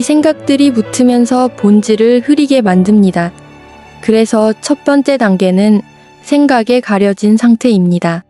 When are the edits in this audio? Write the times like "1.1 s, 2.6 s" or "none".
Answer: none